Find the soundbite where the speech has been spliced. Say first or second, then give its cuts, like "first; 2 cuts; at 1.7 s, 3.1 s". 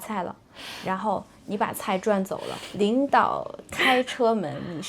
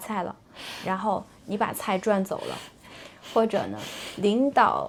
first; 1 cut; at 2.6 s